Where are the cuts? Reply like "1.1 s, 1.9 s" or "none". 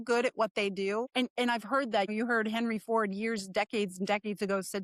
1.1 s, 2.1 s